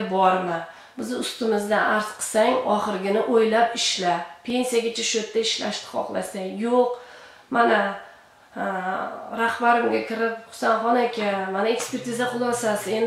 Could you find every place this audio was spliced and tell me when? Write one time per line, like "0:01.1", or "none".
none